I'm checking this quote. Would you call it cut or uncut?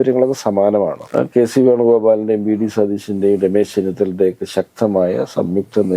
cut